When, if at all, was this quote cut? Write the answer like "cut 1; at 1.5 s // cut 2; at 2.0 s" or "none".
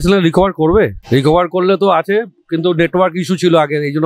cut 1; at 1.0 s